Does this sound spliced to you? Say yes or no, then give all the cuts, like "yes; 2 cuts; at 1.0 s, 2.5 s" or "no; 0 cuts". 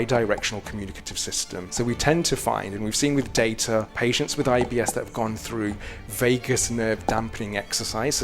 yes; 2 cuts; at 1.7 s, 3.9 s